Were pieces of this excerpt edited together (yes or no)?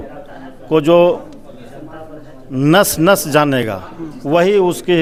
no